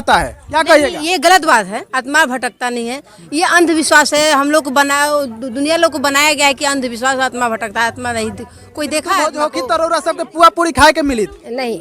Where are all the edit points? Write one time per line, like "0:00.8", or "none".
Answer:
0:09.1